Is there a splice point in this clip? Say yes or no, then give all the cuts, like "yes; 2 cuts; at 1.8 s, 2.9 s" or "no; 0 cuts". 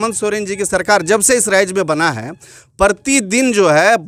no; 0 cuts